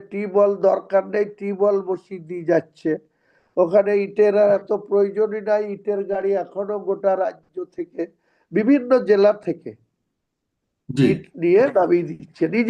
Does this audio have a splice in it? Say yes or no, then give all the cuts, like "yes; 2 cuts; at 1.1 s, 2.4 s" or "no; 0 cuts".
no; 0 cuts